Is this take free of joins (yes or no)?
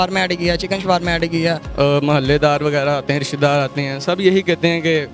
no